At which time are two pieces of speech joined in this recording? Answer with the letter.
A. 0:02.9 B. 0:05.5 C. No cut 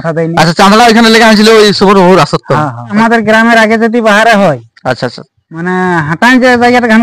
A